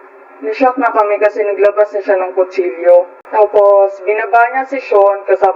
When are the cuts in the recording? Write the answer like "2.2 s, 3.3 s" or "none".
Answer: 3.2 s